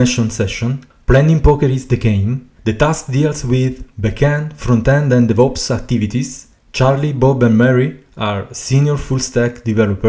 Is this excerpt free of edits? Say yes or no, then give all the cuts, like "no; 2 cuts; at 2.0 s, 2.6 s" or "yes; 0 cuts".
no; 1 cut; at 2.5 s